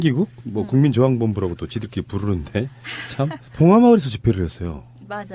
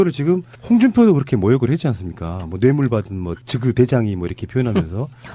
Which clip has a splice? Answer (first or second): second